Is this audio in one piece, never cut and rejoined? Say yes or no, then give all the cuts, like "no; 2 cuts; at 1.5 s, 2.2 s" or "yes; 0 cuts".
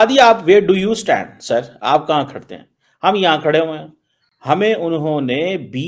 yes; 0 cuts